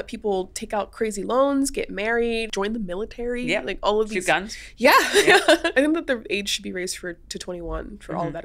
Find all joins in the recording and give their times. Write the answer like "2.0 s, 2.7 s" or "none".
2.5 s, 5.7 s